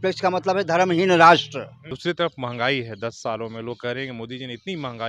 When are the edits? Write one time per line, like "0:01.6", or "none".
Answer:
0:01.8